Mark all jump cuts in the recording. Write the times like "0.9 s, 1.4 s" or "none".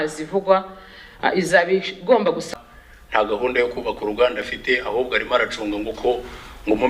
2.5 s

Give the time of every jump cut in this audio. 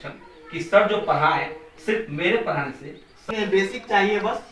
3.2 s

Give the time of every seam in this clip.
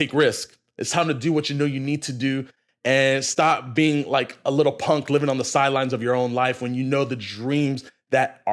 none

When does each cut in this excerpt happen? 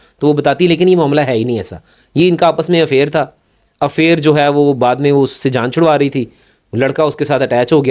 none

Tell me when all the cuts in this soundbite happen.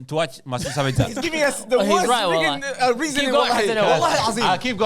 1.1 s

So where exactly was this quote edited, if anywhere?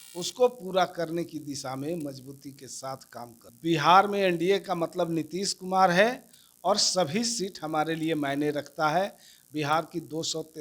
3.4 s

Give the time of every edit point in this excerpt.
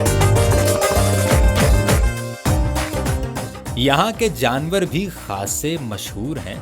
2.9 s

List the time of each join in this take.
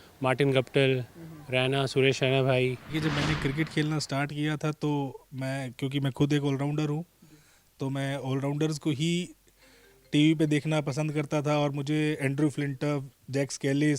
2.8 s

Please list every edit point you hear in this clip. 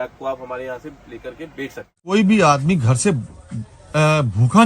2.1 s

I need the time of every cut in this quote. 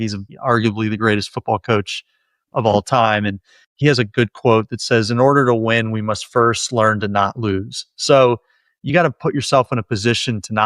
none

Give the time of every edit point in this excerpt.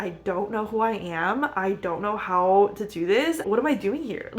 3.4 s

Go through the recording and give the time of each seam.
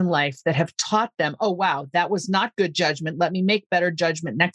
none

